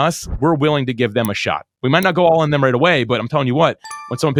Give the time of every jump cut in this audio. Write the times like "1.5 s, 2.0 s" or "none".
none